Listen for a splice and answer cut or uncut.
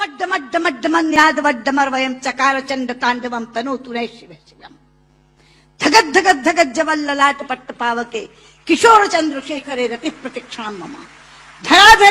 cut